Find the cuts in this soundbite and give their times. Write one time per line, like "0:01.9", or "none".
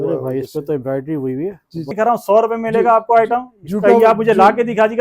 0:01.9